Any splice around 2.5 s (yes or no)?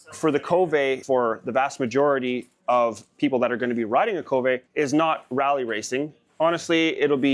no